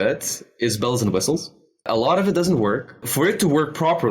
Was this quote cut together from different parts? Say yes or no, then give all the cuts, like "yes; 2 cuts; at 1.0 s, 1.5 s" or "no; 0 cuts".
yes; 2 cuts; at 1.8 s, 3.1 s